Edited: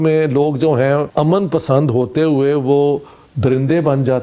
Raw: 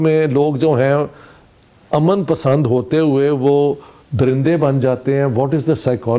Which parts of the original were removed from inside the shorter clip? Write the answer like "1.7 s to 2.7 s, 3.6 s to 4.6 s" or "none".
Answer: 1.1 s to 1.8 s

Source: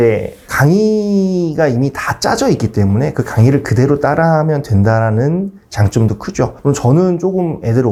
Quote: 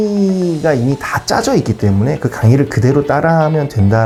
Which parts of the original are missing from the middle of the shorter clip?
none

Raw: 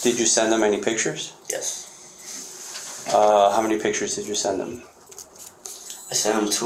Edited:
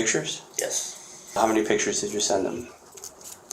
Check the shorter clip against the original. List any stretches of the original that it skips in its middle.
2.3 s to 3.5 s

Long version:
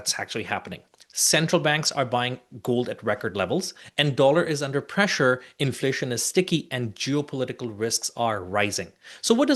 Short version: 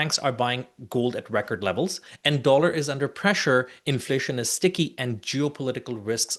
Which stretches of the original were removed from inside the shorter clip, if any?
none

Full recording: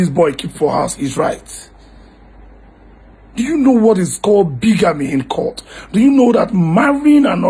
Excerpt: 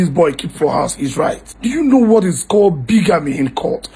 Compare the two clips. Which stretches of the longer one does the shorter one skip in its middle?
1.8 s to 3.6 s

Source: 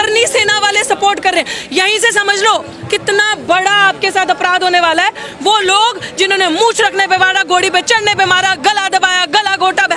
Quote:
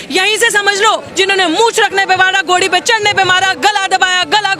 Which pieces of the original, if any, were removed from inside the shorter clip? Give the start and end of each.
2.7 s to 6.1 s

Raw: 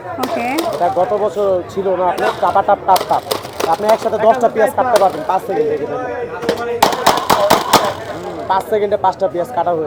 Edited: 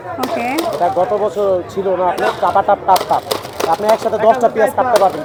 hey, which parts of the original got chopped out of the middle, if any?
none

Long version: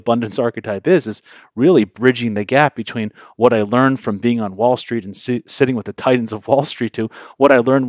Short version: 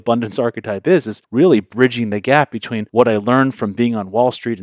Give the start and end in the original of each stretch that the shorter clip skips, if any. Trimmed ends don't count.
1.2 s to 1.4 s, 3.0 s to 3.2 s

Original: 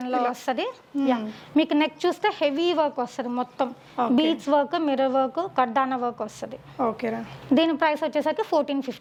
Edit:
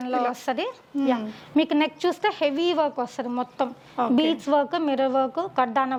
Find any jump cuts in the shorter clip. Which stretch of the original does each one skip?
none

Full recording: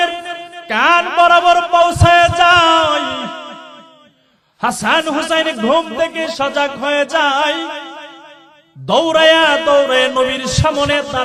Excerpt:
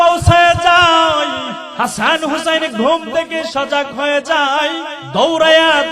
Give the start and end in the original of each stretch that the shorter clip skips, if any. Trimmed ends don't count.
3.3 s to 4.4 s, 7.8 s to 8.7 s

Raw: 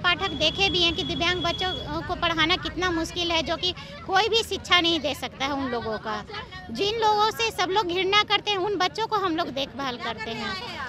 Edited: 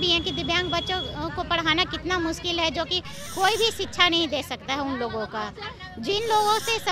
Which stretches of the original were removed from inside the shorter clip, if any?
none

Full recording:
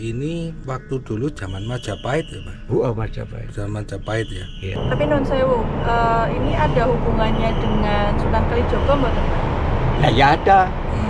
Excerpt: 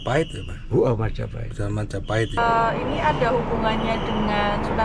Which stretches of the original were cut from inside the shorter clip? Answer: 4.4 s to 5.9 s

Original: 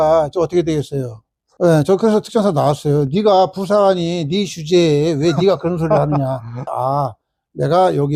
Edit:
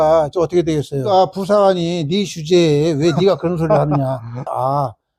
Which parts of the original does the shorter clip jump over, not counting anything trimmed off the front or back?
1.1 s to 3.3 s

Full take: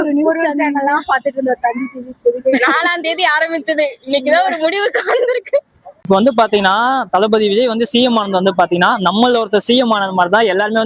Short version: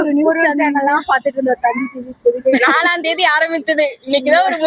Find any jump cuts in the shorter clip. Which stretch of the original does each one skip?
none

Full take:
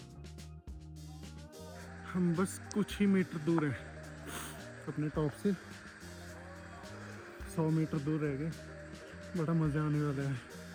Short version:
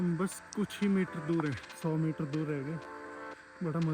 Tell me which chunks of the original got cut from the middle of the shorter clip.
3.9 s to 7.4 s

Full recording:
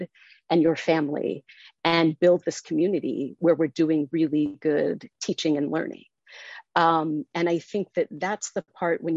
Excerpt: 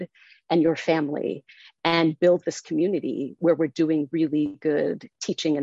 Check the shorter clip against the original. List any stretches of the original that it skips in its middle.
none

